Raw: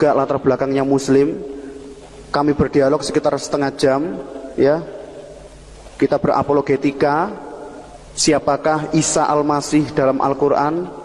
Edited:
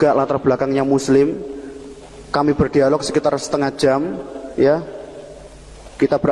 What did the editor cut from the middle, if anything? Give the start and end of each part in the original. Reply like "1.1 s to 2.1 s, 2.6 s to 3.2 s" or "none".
none